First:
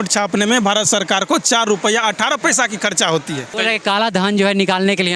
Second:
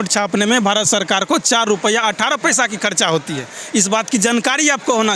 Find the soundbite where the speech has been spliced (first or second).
first